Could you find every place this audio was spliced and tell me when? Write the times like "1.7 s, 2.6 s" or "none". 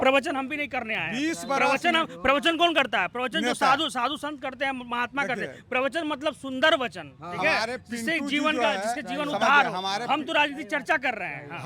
none